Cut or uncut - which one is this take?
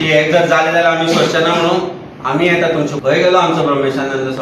cut